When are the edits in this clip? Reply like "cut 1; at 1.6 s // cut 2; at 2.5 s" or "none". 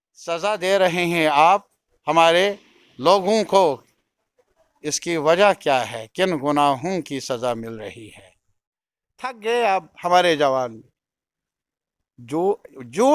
cut 1; at 8.7 s